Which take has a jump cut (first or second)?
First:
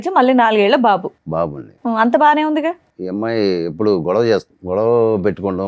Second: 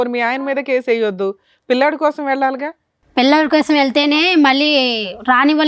first